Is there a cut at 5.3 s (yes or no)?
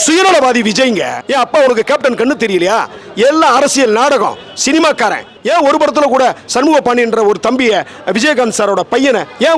yes